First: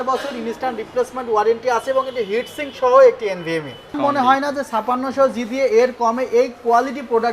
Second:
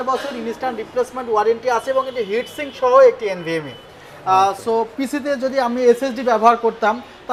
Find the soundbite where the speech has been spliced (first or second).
first